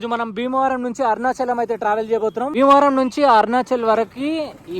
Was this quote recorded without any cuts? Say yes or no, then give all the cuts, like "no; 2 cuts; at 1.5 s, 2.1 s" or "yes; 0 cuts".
no; 1 cut; at 2.5 s